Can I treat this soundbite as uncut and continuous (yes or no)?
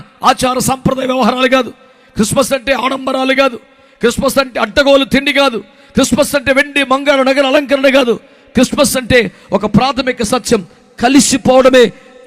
yes